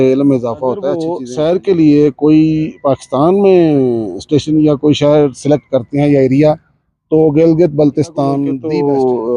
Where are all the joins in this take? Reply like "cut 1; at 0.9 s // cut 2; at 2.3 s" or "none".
cut 1; at 1.1 s // cut 2; at 8.5 s

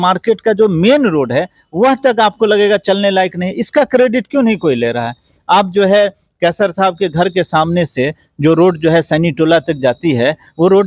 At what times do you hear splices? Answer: none

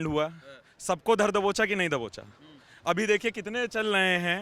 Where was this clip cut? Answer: none

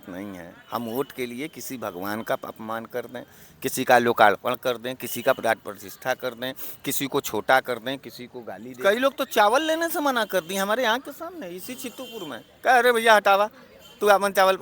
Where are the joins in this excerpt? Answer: cut 1; at 8.7 s

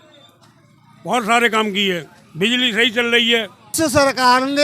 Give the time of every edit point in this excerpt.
cut 1; at 3.7 s

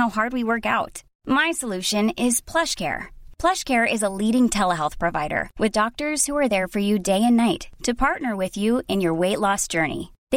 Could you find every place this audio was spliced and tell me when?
none

